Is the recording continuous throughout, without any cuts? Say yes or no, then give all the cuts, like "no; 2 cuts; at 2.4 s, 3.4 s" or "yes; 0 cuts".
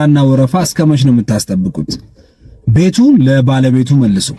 yes; 0 cuts